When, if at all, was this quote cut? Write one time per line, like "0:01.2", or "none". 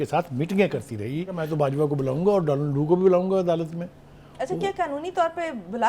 0:01.4